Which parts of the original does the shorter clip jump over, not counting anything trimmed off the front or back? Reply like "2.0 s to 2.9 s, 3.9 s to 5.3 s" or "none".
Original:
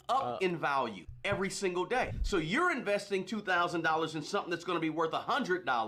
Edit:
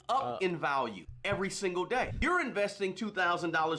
2.2 s to 2.5 s